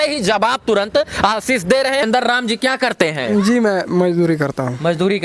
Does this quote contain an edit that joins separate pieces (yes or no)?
yes